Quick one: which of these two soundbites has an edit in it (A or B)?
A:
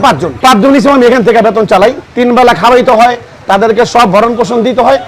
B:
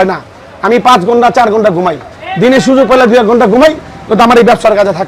A